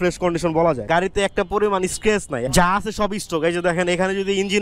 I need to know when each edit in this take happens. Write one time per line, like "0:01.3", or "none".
0:00.8
0:02.4